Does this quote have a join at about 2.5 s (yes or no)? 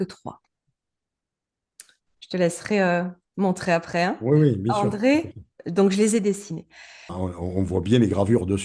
no